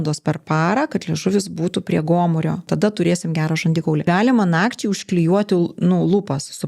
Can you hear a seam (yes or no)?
yes